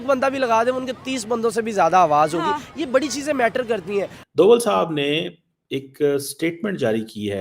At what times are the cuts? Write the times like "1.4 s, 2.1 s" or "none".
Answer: 4.2 s